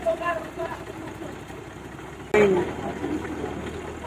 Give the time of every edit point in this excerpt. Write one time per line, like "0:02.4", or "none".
0:02.3